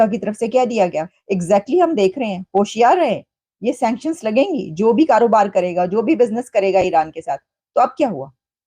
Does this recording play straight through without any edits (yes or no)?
no